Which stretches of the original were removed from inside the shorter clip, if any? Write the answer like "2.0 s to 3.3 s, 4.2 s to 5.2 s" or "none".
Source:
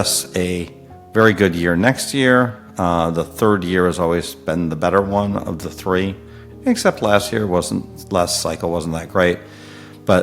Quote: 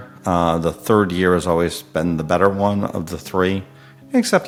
none